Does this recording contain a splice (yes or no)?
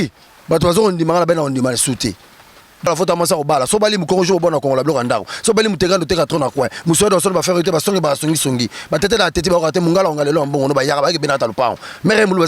yes